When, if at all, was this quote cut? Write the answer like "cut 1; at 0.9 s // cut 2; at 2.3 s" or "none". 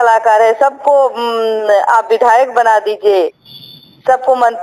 none